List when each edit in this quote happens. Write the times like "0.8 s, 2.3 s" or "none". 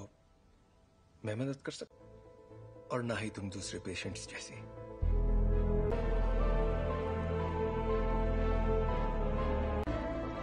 5.9 s